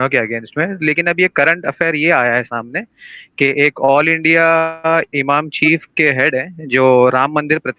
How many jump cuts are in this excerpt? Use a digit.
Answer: 0